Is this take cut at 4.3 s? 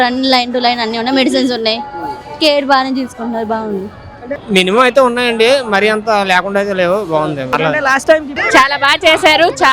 yes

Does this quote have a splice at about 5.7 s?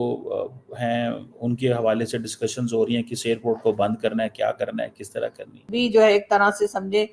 yes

